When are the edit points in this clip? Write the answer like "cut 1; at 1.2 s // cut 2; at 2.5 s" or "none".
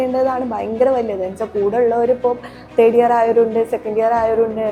none